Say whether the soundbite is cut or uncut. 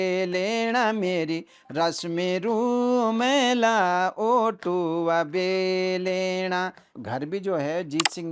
cut